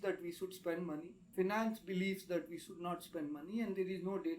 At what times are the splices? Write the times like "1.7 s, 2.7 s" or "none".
none

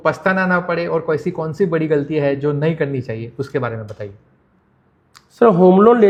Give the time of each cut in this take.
none

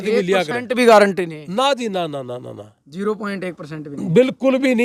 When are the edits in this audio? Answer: none

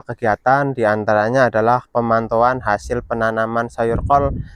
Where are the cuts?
none

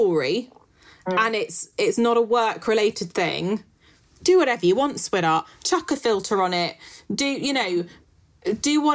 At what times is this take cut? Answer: none

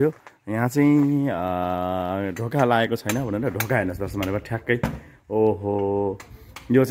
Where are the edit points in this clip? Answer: none

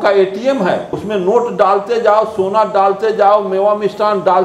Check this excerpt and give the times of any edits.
1.0 s

